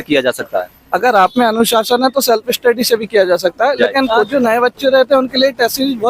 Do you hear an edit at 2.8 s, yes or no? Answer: no